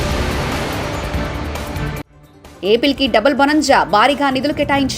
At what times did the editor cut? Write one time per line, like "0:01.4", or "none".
none